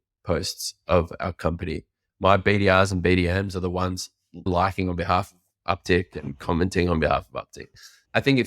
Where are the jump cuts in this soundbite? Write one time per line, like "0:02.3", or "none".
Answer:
0:04.5